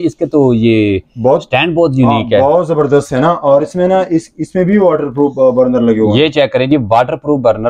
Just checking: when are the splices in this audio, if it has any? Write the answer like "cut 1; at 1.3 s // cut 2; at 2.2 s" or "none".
none